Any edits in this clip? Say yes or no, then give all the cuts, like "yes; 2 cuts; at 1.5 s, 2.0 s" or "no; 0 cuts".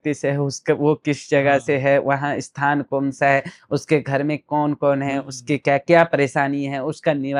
no; 0 cuts